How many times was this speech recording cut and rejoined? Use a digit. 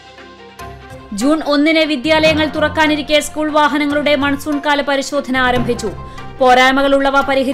0